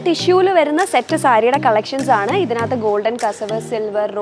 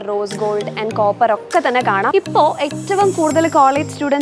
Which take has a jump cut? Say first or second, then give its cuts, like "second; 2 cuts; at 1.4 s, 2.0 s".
second; 1 cut; at 2.1 s